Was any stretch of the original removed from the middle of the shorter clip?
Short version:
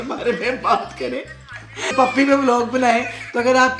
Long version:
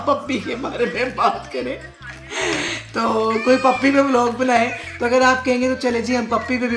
yes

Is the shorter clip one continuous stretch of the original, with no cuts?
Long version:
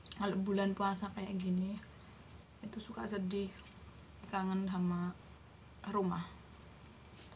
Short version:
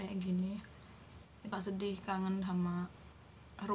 no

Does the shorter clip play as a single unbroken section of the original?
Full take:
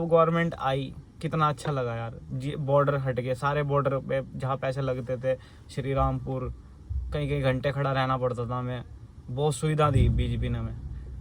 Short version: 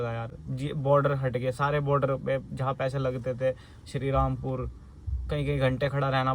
yes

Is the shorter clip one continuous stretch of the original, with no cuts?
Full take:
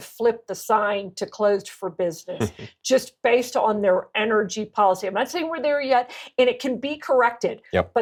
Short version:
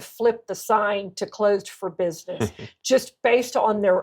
yes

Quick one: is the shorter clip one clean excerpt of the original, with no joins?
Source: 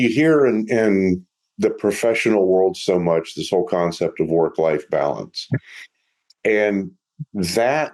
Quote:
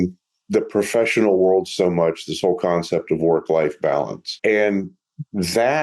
no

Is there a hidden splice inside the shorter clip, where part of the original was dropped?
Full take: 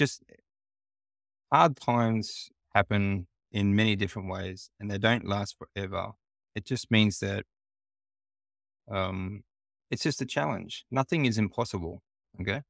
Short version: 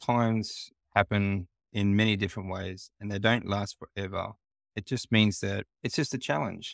yes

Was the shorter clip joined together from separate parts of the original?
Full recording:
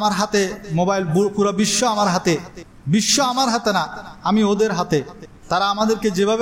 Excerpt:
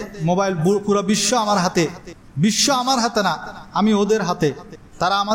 no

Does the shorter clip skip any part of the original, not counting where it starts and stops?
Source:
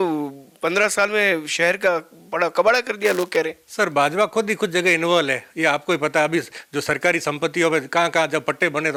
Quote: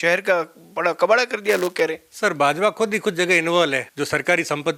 yes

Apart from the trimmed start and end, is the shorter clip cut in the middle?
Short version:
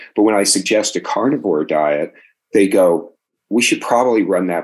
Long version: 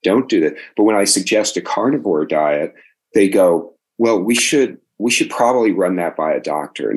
yes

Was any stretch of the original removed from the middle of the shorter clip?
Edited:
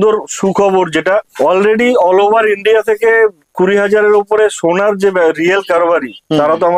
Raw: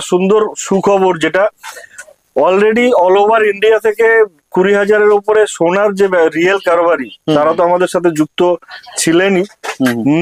yes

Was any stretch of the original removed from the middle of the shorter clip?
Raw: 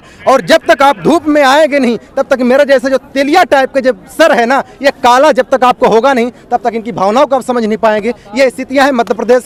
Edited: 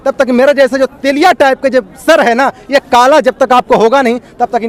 no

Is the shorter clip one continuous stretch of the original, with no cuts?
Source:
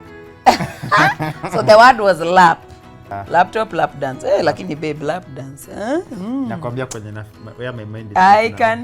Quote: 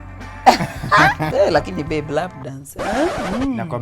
no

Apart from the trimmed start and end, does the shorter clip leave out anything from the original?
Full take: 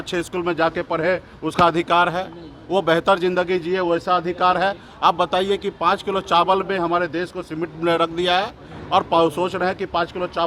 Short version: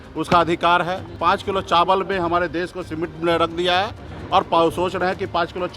yes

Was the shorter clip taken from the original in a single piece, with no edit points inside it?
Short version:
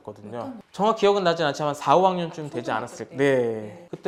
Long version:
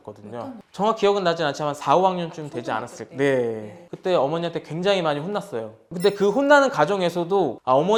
yes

